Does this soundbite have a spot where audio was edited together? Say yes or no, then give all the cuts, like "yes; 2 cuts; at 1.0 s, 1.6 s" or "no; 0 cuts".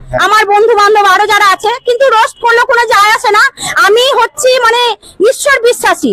no; 0 cuts